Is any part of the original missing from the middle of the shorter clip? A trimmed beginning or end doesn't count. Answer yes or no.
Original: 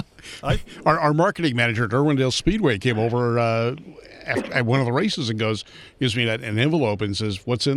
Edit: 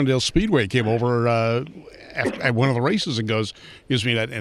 no